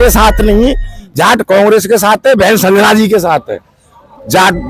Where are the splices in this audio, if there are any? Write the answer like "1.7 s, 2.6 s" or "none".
none